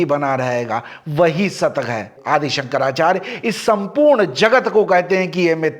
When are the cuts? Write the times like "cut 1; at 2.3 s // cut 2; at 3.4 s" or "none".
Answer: cut 1; at 2.1 s